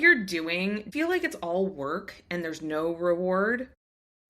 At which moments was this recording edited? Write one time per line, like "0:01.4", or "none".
0:00.9